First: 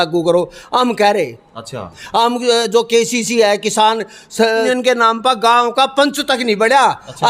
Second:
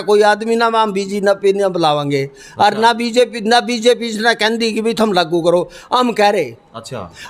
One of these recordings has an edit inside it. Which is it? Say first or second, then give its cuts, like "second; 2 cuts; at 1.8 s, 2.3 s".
first; 1 cut; at 4.6 s